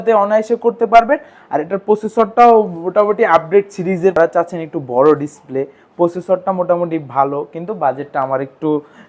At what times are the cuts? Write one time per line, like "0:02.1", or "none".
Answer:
0:04.2